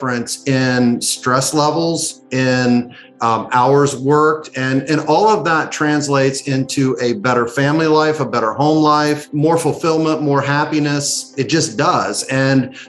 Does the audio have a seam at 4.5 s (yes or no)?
no